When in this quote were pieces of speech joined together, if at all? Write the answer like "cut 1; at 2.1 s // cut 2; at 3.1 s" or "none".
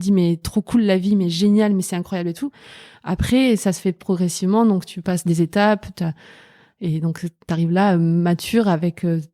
none